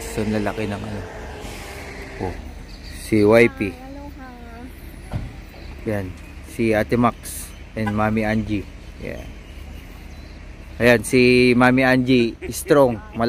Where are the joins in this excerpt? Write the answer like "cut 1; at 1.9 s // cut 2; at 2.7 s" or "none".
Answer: cut 1; at 2.4 s